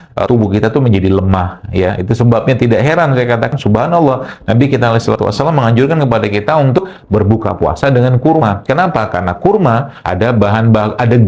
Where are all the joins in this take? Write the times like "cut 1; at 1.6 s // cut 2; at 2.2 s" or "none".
none